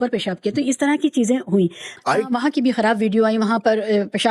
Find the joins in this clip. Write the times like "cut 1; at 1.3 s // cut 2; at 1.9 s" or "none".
cut 1; at 1.9 s

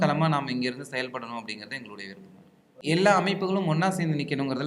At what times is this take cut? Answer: cut 1; at 2.8 s

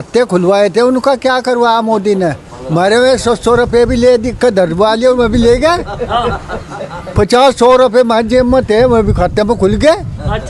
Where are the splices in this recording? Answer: none

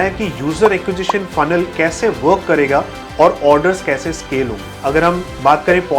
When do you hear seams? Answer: cut 1; at 4.7 s

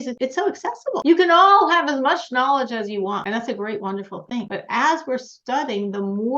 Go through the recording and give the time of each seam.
cut 1; at 1.0 s

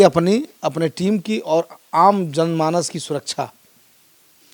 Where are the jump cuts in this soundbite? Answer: none

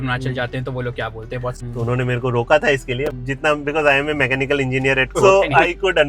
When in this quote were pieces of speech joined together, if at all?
cut 1; at 1.6 s // cut 2; at 5.1 s

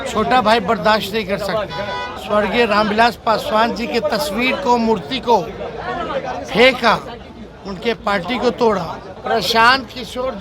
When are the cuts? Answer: cut 1; at 2.1 s // cut 2; at 9.1 s

